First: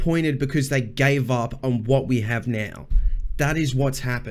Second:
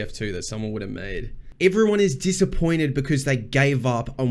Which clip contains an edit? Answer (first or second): second